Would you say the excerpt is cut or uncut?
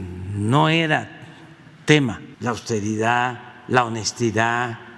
cut